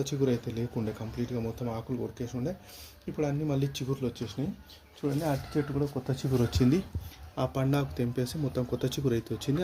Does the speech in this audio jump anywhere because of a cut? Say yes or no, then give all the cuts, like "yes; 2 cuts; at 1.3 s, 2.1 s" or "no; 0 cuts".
no; 0 cuts